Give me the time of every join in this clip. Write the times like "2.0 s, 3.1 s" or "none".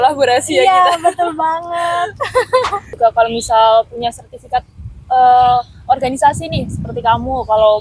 2.9 s